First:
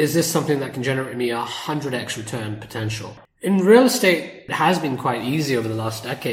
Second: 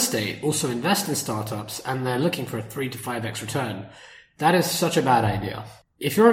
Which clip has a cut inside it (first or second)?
first